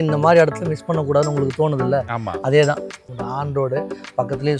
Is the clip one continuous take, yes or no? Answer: yes